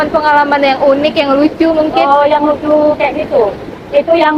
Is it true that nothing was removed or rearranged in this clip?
yes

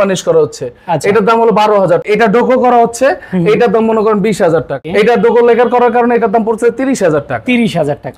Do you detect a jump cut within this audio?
yes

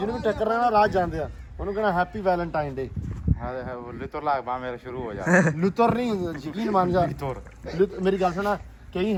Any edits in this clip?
no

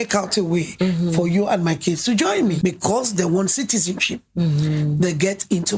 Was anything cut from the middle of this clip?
yes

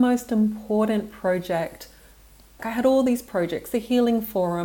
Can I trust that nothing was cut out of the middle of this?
no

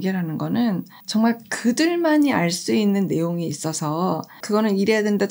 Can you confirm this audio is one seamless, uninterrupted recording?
no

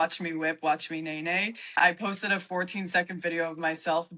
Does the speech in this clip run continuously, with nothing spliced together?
no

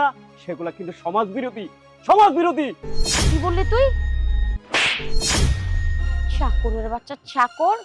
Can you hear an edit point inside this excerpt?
no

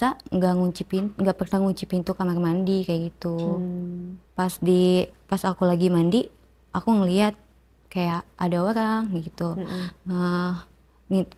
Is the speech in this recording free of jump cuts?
yes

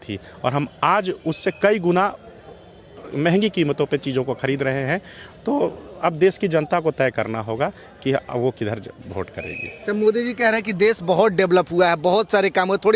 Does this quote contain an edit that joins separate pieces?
no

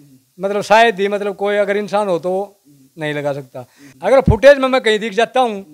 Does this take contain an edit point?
yes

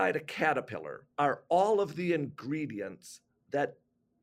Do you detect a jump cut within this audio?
yes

